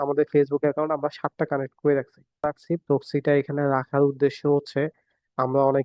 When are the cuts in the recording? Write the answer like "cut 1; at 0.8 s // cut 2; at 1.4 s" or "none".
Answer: cut 1; at 2.5 s